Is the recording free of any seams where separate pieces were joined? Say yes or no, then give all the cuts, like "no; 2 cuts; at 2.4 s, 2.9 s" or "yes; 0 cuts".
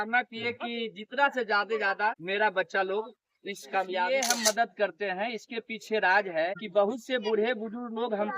no; 3 cuts; at 2.2 s, 4.1 s, 6.6 s